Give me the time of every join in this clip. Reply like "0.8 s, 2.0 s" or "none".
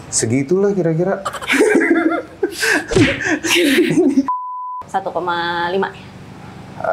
none